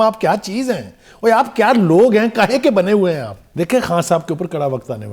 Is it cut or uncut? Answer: cut